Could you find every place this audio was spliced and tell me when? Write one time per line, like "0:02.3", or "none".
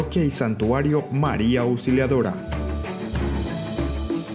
0:02.4